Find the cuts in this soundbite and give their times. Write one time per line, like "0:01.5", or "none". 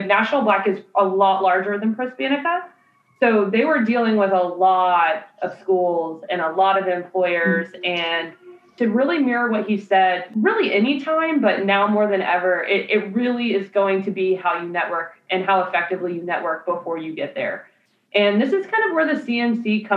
0:08.7
0:10.2